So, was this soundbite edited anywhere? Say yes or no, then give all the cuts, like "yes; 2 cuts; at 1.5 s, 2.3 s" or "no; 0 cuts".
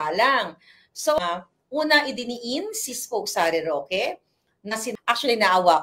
yes; 2 cuts; at 1.2 s, 4.9 s